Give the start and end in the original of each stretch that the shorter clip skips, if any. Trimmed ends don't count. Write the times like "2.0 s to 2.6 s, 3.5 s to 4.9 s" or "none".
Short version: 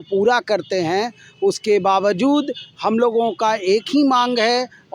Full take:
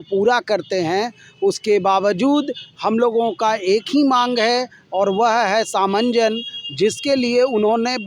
none

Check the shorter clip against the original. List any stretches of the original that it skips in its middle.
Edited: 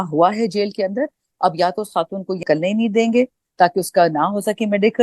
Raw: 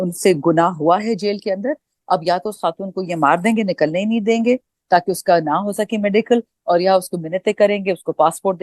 3.1 s to 3.8 s

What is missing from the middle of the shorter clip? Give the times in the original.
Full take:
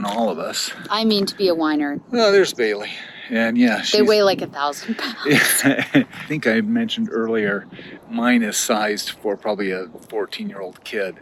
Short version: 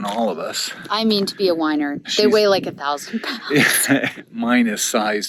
2.1 s to 3.8 s, 5.8 s to 7.8 s

